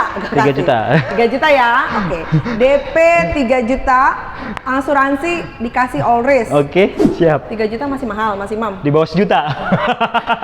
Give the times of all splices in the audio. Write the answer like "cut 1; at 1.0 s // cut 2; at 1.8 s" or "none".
cut 1; at 7.0 s